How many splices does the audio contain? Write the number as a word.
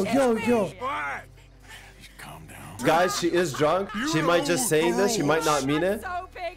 three